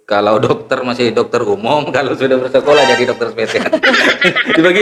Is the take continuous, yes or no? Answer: yes